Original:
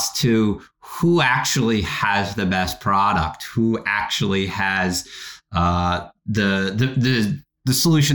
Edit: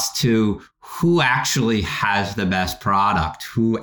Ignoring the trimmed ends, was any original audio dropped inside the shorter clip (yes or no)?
no